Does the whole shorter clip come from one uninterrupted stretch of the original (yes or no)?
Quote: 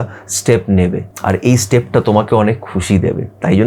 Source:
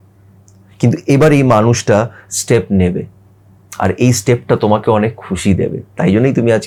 no